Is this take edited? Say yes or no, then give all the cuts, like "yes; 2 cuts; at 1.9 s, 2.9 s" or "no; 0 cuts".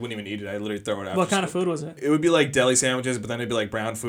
no; 0 cuts